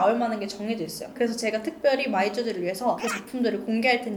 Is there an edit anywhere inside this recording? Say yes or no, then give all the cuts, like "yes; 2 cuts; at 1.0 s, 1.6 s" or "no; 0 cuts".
no; 0 cuts